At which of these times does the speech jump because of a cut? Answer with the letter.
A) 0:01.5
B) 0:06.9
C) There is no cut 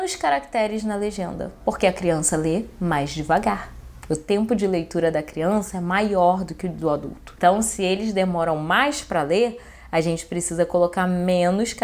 A